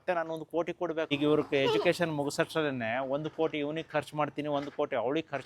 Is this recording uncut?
no; 1 cut; at 1.1 s

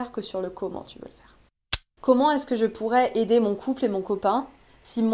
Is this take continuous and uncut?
no; 1 cut; at 1.9 s

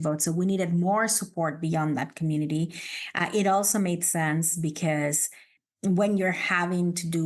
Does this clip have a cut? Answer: yes; 1 cut; at 5.6 s

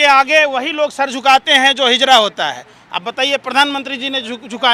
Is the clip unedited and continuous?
yes; 0 cuts

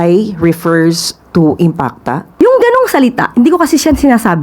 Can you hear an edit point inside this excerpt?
yes; 1 cut; at 2.3 s

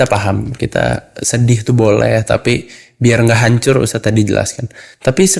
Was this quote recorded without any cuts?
yes; 0 cuts

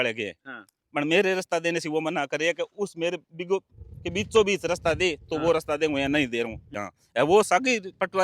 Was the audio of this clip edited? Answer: yes; 1 cut; at 6.6 s

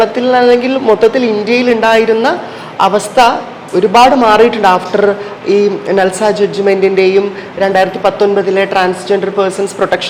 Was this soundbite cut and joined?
no; 0 cuts

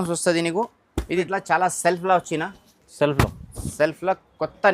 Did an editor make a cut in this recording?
yes; 1 cut; at 1.3 s

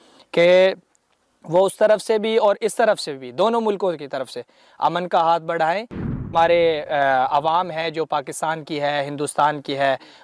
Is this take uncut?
no; 1 cut; at 6.2 s

